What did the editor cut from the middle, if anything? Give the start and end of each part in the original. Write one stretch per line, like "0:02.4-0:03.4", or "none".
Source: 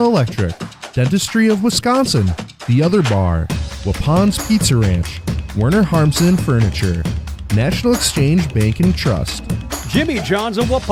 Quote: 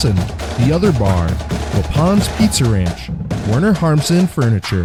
none